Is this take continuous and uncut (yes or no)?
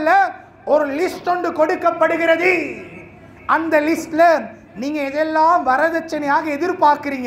yes